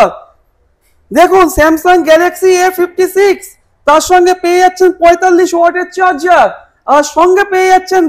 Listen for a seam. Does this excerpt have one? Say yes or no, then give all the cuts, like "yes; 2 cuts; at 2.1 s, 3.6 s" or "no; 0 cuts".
no; 0 cuts